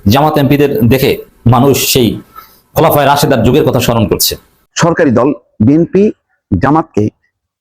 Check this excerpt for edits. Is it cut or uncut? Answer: cut